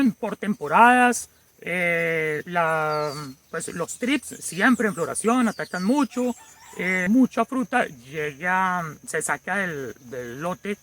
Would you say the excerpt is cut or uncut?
cut